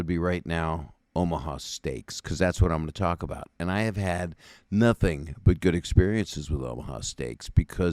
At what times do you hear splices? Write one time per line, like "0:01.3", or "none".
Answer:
none